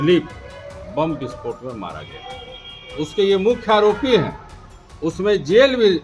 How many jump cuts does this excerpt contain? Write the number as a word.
zero